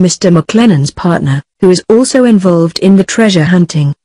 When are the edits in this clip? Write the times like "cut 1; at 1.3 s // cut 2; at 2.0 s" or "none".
cut 1; at 3.0 s